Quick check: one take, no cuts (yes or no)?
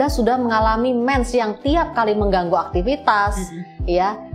yes